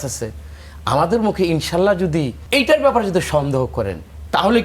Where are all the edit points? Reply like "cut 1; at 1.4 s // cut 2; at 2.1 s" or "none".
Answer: cut 1; at 2.4 s